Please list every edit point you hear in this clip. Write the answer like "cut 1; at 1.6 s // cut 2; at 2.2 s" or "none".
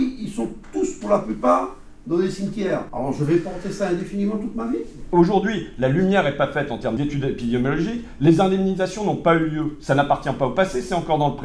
cut 1; at 2.9 s // cut 2; at 7.0 s